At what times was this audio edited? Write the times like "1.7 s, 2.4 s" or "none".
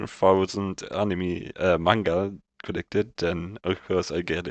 none